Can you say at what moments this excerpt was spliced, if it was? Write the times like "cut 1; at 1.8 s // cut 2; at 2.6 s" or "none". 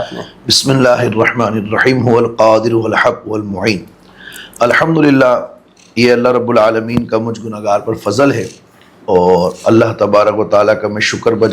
none